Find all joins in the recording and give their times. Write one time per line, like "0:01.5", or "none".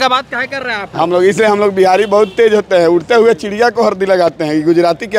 none